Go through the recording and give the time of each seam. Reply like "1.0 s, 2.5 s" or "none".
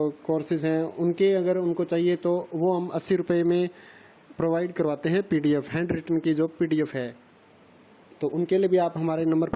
1.2 s